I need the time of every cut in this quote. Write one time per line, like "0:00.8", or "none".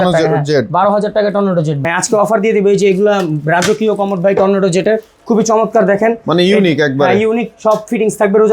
0:01.8

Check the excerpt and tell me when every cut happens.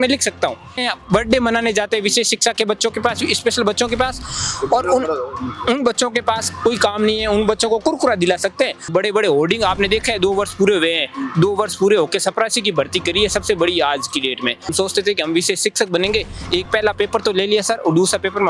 0:00.9
0:08.9
0:14.7

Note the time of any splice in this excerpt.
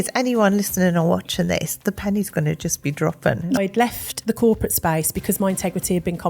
0:03.6

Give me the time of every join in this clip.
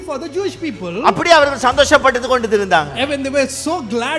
none

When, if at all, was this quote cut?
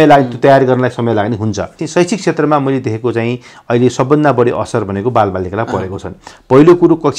0:01.8

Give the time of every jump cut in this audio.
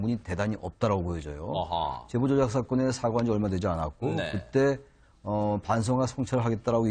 0:02.0

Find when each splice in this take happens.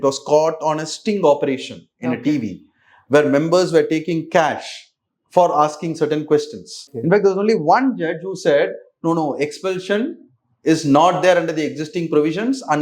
0:06.9

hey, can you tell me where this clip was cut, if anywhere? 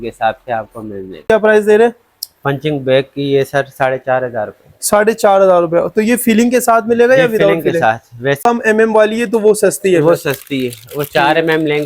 0:01.3
0:08.4

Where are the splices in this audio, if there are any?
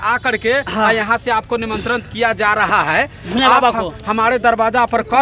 none

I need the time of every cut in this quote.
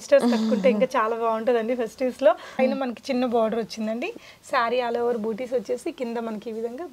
0:02.6

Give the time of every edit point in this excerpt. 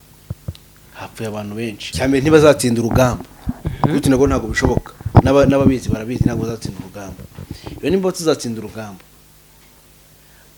0:01.8

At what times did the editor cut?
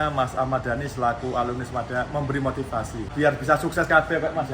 0:03.1

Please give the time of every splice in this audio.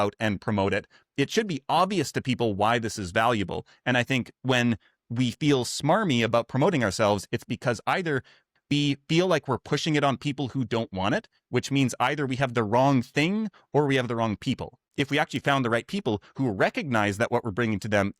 0:14.8

